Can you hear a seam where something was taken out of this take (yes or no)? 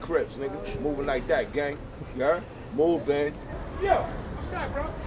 yes